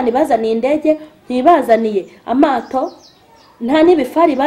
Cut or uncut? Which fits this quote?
uncut